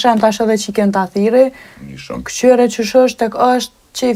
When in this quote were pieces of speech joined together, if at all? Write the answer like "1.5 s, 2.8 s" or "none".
none